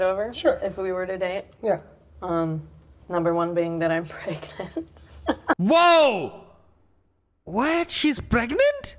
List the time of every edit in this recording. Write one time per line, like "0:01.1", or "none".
none